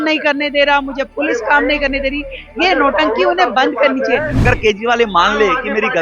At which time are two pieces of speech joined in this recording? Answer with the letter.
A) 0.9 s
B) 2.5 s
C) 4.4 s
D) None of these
C